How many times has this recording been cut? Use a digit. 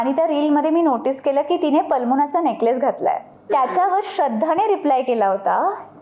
1